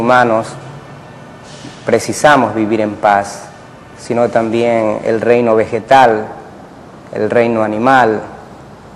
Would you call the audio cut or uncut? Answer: cut